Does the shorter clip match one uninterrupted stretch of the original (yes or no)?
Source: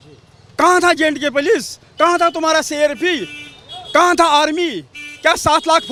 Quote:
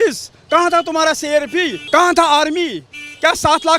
no